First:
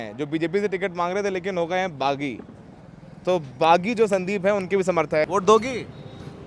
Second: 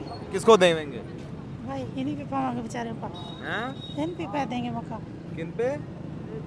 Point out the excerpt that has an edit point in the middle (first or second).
first